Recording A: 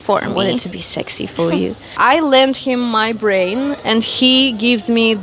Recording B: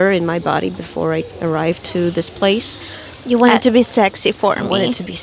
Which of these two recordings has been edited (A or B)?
A